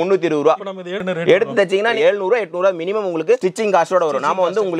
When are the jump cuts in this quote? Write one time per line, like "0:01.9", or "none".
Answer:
0:01.0